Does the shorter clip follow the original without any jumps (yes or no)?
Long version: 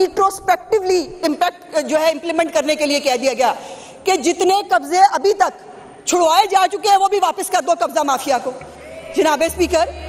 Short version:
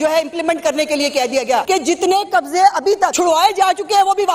no